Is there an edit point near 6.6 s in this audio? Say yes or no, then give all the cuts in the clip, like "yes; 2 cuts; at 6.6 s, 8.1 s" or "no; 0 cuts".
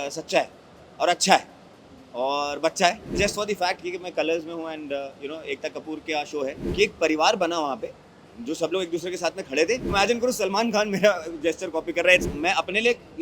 yes; 4 cuts; at 3.1 s, 6.6 s, 9.9 s, 12.2 s